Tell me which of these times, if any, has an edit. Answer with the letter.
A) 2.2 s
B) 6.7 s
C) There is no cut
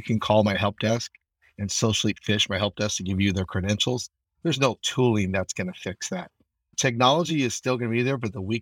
B